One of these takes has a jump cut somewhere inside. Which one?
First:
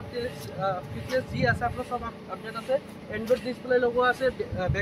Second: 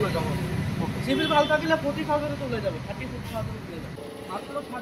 second; 1 cut; at 3.9 s

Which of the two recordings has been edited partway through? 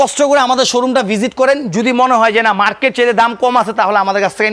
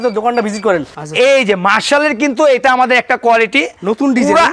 second; 1 cut; at 0.9 s

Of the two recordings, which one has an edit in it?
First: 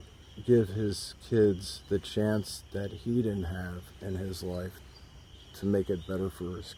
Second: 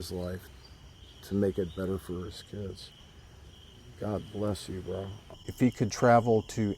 second; 1 cut; at 5.1 s

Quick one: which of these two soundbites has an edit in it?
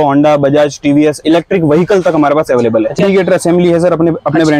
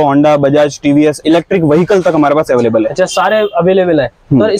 first; 1 cut; at 3.0 s

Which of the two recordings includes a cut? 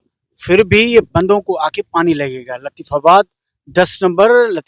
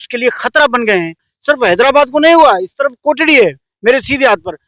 second; 1 cut; at 1.3 s

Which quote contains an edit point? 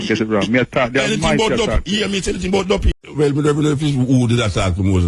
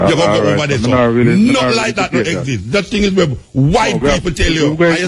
first; 1 cut; at 3.1 s

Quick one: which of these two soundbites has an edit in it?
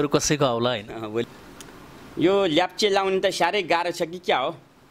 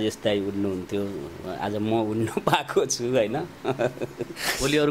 first; 1 cut; at 1.3 s

